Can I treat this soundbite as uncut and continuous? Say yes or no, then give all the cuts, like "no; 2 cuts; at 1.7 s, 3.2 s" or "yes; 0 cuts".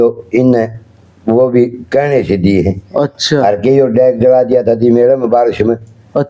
yes; 0 cuts